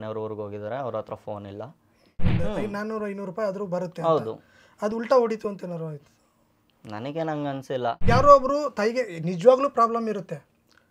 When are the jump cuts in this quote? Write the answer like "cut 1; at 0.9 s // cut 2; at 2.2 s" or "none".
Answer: cut 1; at 2.3 s // cut 2; at 8.0 s

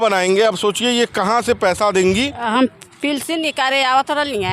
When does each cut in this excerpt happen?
cut 1; at 2.4 s

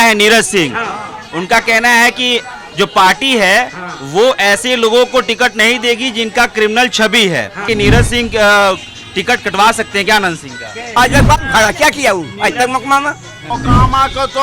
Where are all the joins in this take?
cut 1; at 7.6 s // cut 2; at 10.9 s // cut 3; at 13.5 s

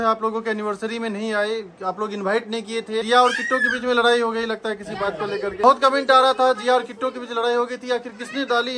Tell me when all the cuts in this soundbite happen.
cut 1; at 3.0 s // cut 2; at 5.6 s

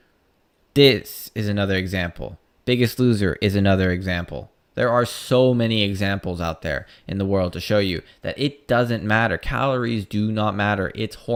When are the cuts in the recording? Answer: none

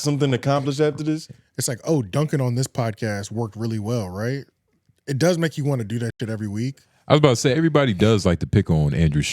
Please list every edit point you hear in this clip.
cut 1; at 1.4 s // cut 2; at 6.9 s

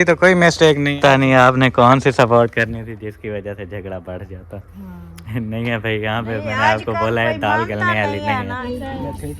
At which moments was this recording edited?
cut 1; at 1.0 s // cut 2; at 8.6 s

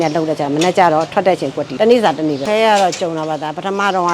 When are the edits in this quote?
cut 1; at 1.6 s // cut 2; at 2.4 s

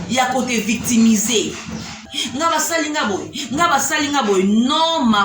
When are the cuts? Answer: cut 1; at 2.0 s

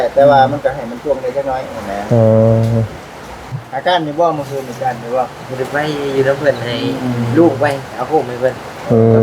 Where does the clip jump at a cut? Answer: cut 1; at 3.6 s

